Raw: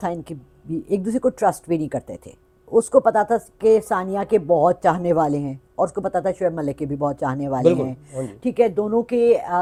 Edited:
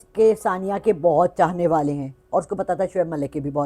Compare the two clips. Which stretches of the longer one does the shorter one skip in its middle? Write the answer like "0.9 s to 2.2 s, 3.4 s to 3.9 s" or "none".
none